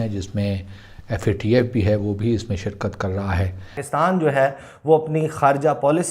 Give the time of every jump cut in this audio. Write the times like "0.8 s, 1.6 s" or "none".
3.8 s